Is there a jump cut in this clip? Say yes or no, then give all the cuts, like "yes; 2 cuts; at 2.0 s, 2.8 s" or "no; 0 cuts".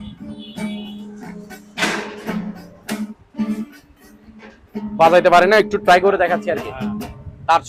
no; 0 cuts